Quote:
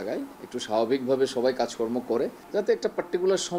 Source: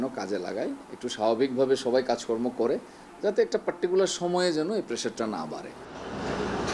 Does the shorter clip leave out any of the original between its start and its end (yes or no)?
yes